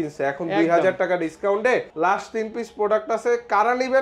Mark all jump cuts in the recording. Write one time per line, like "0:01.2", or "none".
0:01.9